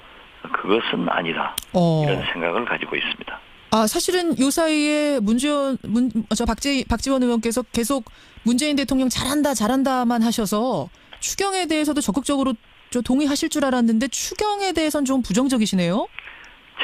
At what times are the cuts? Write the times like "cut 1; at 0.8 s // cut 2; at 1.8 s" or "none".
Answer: none